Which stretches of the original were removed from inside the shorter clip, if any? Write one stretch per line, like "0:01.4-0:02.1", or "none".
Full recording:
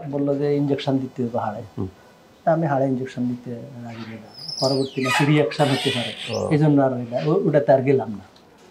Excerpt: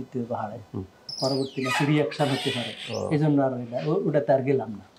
0:02.0-0:04.4